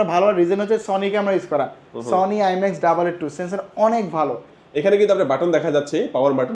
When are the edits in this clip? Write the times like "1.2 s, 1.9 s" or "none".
4.6 s